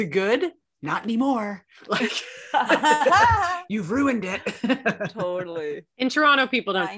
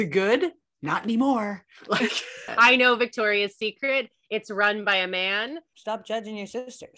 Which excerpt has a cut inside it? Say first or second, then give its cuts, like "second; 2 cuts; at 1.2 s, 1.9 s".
second; 2 cuts; at 2.5 s, 5.7 s